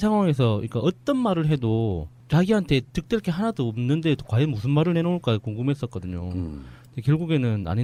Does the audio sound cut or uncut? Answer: uncut